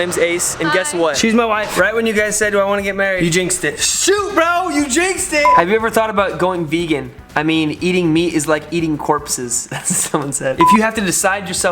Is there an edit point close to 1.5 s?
yes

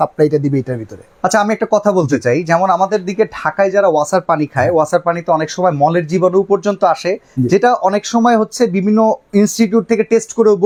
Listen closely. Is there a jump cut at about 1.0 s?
no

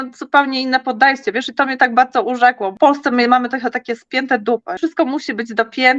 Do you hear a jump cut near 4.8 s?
yes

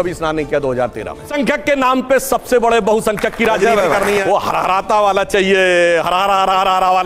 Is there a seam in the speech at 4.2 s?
yes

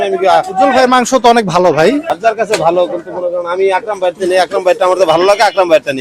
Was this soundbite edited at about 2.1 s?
yes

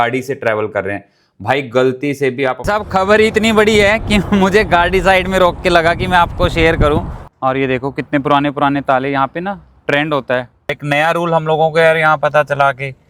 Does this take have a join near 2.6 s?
yes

